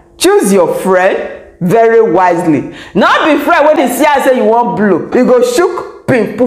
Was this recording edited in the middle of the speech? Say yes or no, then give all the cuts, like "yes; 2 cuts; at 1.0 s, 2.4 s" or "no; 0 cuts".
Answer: yes; 2 cuts; at 3.8 s, 5.1 s